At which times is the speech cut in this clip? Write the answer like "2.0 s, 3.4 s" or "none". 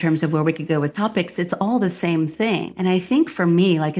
0.9 s, 2.7 s